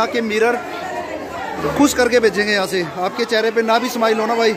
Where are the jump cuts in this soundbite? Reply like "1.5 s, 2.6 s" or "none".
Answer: none